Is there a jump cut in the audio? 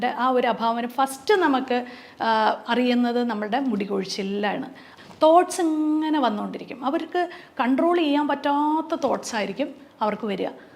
yes; 1 cut; at 4.8 s

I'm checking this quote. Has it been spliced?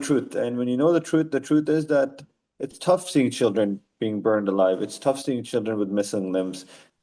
no; 0 cuts

